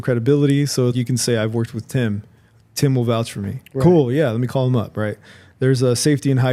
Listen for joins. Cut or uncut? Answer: uncut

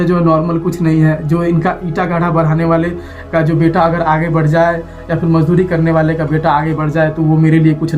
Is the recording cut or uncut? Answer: uncut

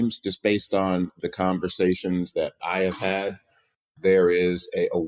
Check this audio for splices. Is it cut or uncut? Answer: cut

